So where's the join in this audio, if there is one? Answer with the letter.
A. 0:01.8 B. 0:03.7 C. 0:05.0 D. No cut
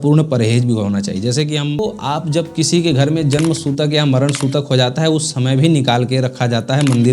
A